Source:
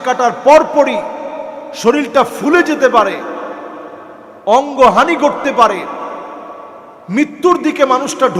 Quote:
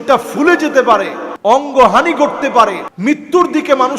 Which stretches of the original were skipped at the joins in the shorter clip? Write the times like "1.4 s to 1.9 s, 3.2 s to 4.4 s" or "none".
3.3 s to 4.3 s, 5.9 s to 7.0 s